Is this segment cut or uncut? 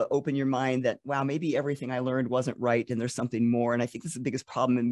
uncut